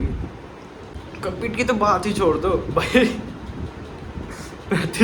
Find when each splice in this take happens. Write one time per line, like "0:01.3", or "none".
0:00.9